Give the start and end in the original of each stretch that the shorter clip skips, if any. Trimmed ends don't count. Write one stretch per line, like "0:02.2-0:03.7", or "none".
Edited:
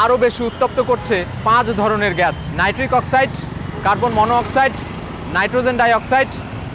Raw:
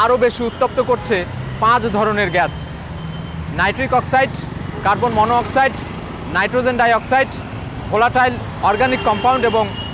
0:01.3-0:01.5
0:02.6-0:03.5